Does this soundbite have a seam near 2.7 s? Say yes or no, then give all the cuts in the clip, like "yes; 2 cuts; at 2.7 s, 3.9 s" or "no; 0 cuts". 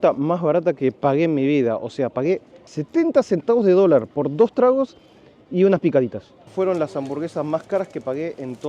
yes; 2 cuts; at 2.7 s, 6.5 s